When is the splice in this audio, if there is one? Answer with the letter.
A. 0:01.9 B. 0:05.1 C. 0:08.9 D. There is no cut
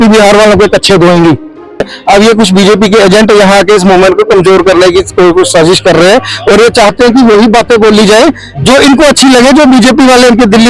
A